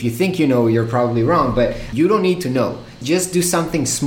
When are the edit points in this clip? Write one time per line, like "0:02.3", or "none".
0:01.9